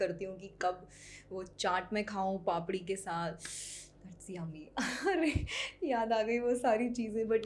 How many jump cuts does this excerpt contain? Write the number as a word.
zero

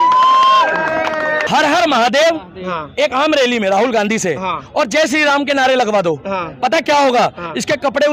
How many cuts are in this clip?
zero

